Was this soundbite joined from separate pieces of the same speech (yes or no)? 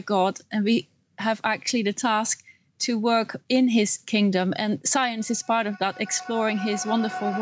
no